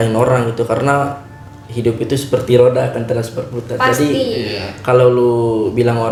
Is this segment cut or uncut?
uncut